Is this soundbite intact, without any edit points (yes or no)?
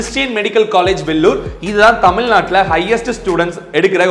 yes